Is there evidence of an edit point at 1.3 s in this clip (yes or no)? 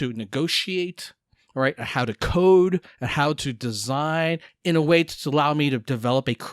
no